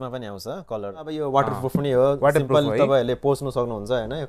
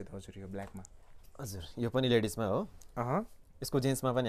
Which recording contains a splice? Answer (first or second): first